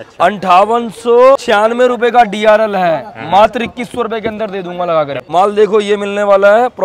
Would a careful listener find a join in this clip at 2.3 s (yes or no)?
no